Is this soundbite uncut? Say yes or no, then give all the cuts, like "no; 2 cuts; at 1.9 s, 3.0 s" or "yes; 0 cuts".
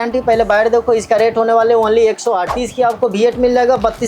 no; 1 cut; at 2.5 s